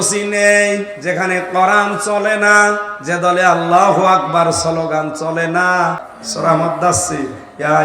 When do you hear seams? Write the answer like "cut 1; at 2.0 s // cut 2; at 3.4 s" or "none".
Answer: cut 1; at 6.1 s